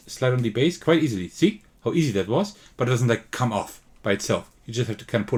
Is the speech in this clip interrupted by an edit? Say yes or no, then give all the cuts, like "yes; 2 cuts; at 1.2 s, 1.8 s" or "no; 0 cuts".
no; 0 cuts